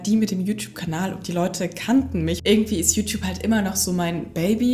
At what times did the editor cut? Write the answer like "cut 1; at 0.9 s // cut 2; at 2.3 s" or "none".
cut 1; at 2.4 s